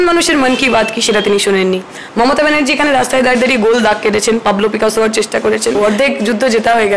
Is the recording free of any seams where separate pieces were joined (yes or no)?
no